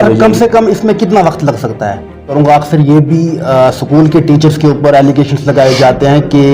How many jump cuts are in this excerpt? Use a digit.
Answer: 1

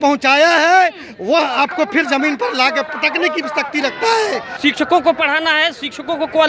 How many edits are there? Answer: 1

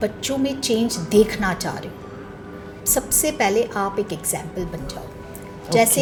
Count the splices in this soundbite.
0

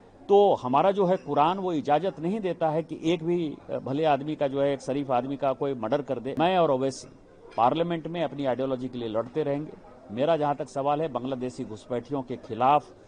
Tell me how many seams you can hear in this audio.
1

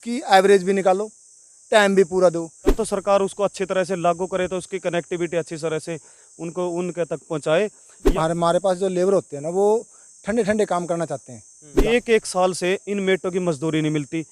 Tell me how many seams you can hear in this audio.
3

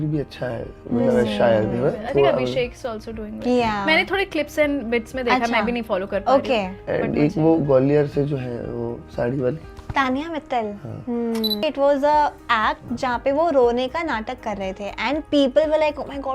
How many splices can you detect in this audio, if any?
1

